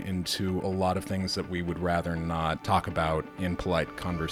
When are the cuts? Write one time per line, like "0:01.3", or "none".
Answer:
0:02.6
0:03.3